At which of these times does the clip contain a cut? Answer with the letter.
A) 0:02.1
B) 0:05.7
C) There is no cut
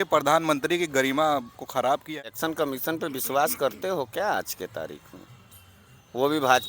A